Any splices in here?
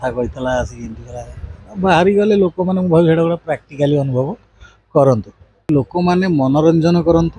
yes; 1 cut; at 5.7 s

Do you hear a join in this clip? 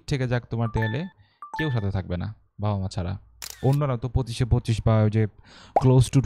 yes; 1 cut; at 3.6 s

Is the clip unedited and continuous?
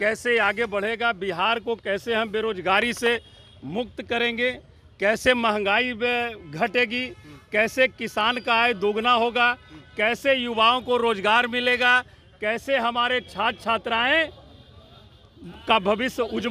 yes; 0 cuts

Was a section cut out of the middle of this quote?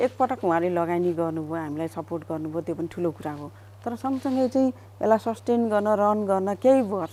no; 0 cuts

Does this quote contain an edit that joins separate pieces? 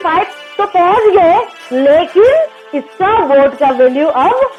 no; 0 cuts

